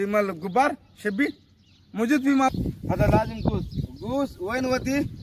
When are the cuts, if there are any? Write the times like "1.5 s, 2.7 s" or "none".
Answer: 2.5 s